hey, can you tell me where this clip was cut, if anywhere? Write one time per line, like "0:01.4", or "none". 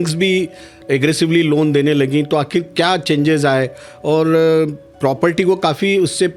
none